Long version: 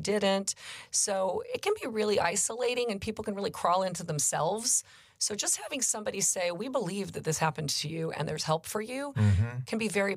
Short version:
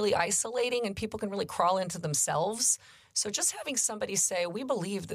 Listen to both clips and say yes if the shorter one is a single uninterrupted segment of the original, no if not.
yes